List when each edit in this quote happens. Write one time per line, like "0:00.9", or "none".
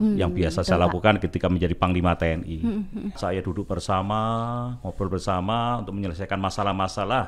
0:03.2